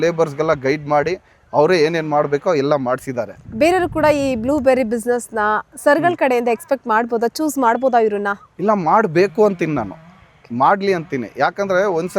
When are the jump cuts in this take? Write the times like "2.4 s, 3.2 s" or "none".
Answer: none